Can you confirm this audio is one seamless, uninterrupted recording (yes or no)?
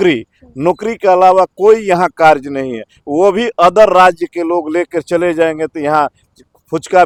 yes